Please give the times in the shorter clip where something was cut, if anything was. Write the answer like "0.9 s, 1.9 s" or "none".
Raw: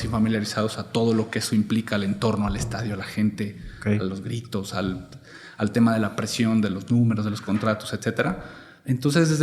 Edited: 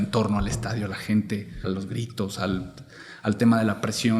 1.6 s